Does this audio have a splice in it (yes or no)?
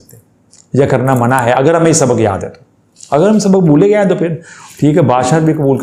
no